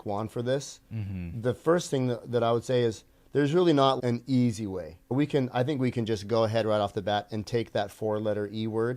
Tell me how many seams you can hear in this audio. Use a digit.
2